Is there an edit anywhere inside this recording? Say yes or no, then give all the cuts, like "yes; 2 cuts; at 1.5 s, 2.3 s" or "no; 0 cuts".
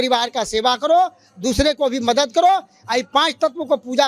yes; 1 cut; at 2.8 s